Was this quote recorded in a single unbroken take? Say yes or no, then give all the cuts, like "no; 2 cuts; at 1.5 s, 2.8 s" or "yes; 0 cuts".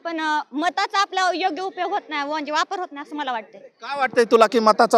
yes; 0 cuts